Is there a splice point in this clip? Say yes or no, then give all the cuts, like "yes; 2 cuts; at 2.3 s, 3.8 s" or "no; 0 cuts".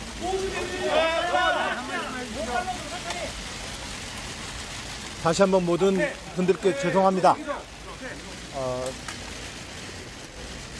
no; 0 cuts